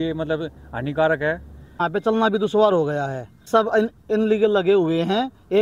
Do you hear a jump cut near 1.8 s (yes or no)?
yes